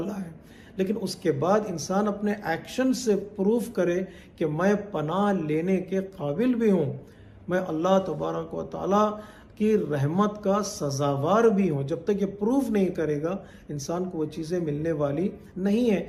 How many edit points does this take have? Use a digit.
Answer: 0